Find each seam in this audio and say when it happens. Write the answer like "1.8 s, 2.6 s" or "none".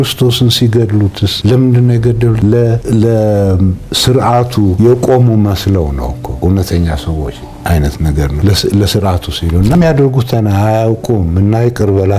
1.3 s, 2.8 s, 4.7 s, 6.2 s, 8.4 s, 9.7 s